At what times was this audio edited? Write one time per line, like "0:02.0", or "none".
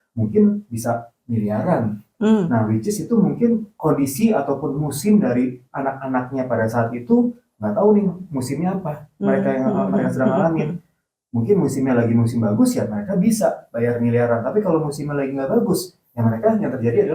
none